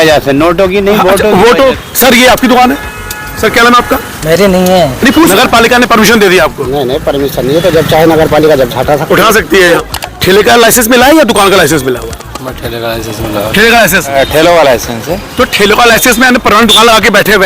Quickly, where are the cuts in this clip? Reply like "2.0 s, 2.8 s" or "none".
1.8 s, 5.3 s, 9.8 s, 14.1 s